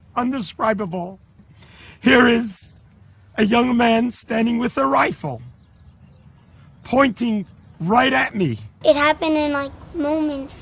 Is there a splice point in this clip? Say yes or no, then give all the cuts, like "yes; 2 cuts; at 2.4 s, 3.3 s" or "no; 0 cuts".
yes; 1 cut; at 8.8 s